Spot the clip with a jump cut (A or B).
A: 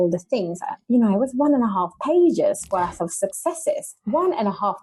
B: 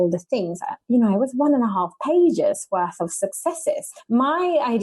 B